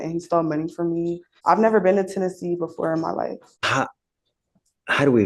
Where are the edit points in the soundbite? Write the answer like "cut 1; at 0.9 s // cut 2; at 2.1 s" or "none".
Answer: cut 1; at 1.3 s // cut 2; at 3.5 s